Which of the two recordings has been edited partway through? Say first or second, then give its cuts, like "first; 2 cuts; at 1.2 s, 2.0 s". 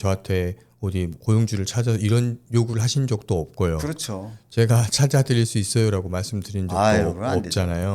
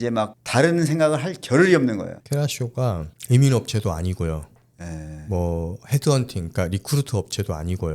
second; 2 cuts; at 2.2 s, 3.1 s